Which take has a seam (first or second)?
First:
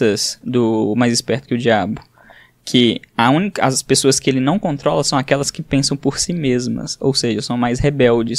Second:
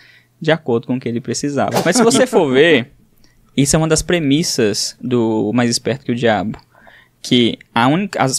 second